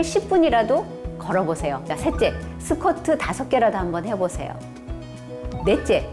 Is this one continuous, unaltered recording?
no; 1 cut; at 1.9 s

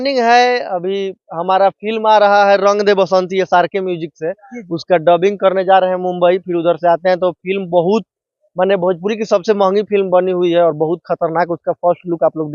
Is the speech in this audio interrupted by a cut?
no; 0 cuts

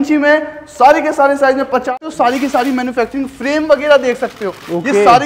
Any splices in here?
yes; 1 cut; at 1.9 s

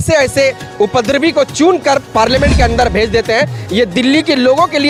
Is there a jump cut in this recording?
no; 0 cuts

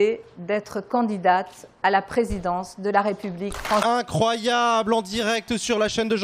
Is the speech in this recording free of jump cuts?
yes; 0 cuts

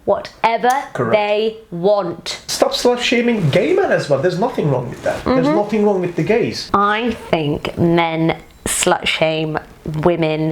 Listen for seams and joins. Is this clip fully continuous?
no; 2 cuts; at 2.4 s, 6.6 s

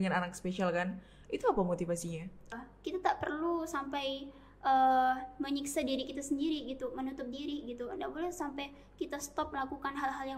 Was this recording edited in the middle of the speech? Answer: yes; 1 cut; at 2.6 s

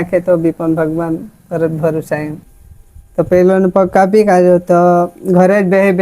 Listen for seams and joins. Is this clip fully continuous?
no; 1 cut; at 2.3 s

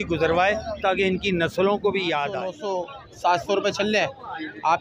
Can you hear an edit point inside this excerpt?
yes; 1 cut; at 2.6 s

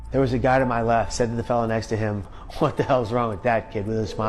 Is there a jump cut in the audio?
yes; 2 cuts; at 1.1 s, 2.4 s

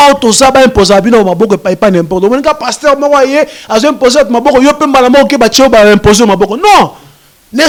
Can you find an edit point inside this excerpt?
no; 0 cuts

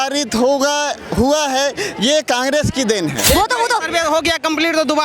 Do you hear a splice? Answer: yes; 1 cut; at 3.2 s

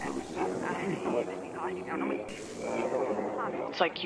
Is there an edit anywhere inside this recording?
yes; 1 cut; at 2.3 s

